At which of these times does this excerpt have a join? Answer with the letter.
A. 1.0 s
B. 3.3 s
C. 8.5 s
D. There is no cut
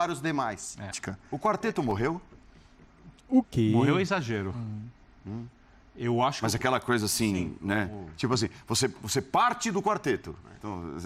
A